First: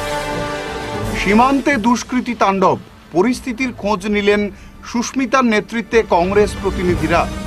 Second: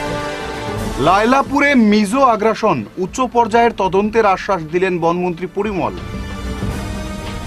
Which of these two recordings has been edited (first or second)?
first